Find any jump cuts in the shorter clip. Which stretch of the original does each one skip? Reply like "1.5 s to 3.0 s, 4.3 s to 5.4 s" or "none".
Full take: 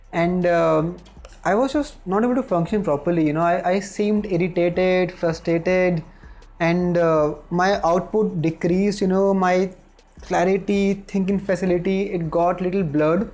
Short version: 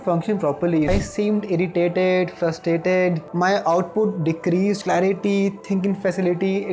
3.3 s to 3.7 s, 6.1 s to 7.4 s, 9.0 s to 10.2 s